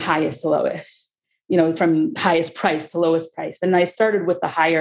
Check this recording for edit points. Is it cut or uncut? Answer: cut